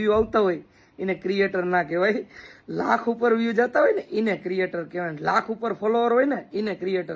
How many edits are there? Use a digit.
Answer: 1